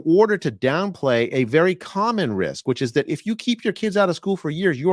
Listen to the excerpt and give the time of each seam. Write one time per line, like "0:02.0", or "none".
none